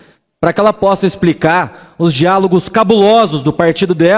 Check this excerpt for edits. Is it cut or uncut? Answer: uncut